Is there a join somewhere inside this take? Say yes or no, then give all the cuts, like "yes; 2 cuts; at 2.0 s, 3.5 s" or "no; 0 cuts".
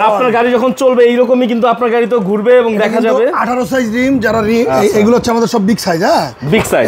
no; 0 cuts